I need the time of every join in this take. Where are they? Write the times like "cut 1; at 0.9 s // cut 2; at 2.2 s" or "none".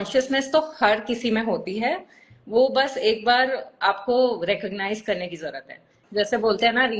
cut 1; at 5.9 s